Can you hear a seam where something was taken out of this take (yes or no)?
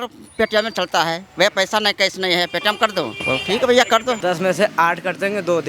yes